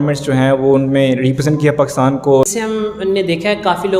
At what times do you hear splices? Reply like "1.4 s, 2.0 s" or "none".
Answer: 2.5 s